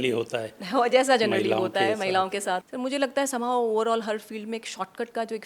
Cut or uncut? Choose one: cut